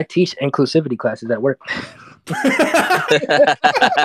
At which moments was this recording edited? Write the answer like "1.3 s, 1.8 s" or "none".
none